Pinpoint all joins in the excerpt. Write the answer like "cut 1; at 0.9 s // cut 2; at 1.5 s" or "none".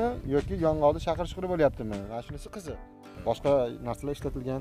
cut 1; at 3.0 s